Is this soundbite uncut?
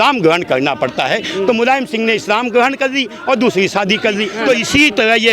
no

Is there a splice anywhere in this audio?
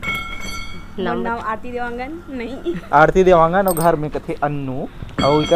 no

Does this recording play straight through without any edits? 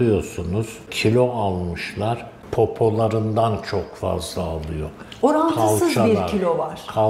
no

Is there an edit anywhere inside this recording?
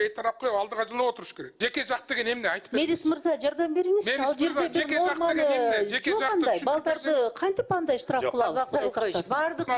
yes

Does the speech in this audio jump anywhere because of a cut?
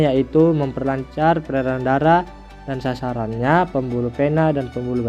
no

